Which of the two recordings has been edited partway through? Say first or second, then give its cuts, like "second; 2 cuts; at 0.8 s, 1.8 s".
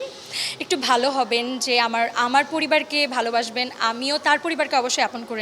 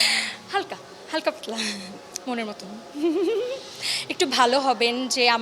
second; 1 cut; at 2.0 s